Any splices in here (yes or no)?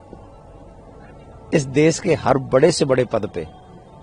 no